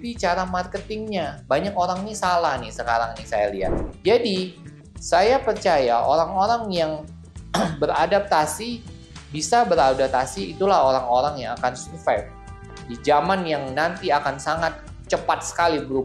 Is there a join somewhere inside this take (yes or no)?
yes